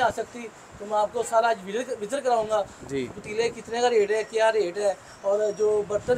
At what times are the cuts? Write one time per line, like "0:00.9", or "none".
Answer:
none